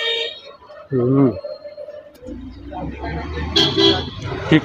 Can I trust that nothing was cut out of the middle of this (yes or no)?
no